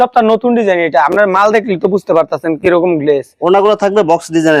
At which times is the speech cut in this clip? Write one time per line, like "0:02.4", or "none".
none